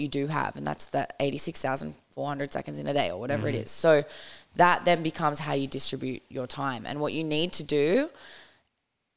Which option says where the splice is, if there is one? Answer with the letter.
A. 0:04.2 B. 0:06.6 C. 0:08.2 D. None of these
D